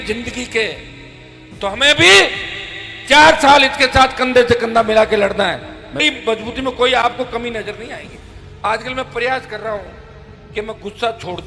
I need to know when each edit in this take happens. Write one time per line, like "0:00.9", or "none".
0:06.0